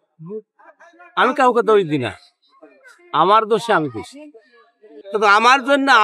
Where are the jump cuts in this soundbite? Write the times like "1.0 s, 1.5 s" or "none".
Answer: 5.0 s